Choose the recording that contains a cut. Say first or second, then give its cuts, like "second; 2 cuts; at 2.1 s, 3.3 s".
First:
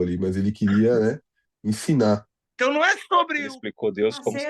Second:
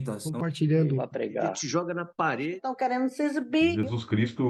first; 1 cut; at 2.4 s